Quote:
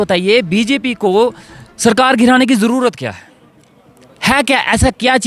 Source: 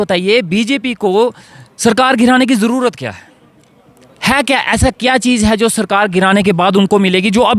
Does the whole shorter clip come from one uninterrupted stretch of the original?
yes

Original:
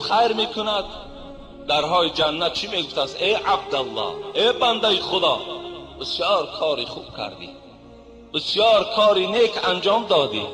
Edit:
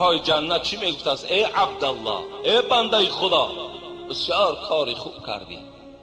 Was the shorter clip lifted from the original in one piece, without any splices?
yes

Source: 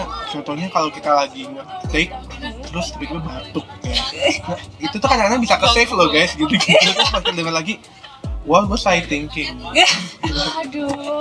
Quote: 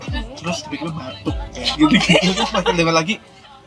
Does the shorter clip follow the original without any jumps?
no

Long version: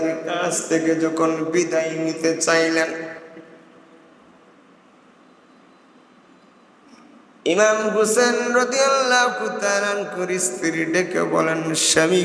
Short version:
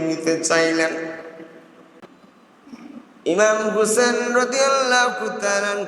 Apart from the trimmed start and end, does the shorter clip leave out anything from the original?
yes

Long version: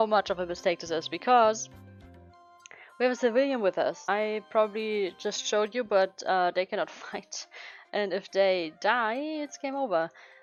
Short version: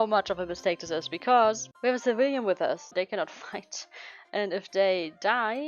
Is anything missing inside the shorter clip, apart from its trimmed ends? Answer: yes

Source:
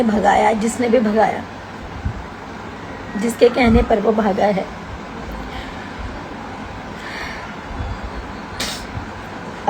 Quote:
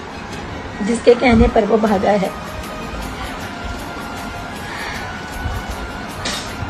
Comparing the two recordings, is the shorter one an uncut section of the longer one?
yes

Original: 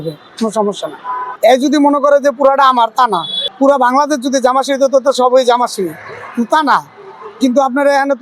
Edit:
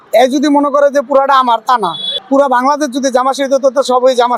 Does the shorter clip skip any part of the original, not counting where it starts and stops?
no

